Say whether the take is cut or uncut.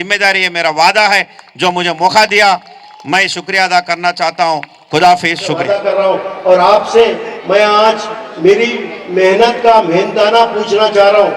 cut